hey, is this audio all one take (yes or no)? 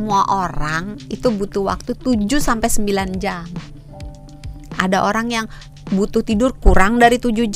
yes